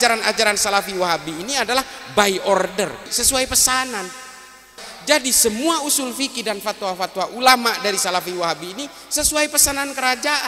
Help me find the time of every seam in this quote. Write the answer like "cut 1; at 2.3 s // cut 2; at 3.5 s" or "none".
cut 1; at 3.1 s // cut 2; at 4.8 s